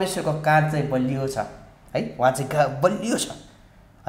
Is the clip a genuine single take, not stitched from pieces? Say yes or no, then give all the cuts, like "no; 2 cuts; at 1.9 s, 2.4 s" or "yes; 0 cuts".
yes; 0 cuts